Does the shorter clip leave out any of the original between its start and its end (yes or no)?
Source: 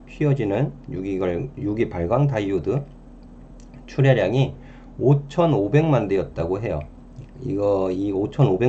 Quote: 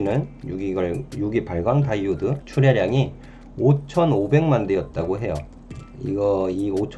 yes